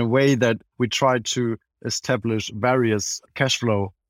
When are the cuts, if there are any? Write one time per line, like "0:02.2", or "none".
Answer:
none